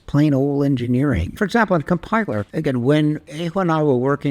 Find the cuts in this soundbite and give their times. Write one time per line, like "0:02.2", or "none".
0:01.4
0:02.5
0:03.3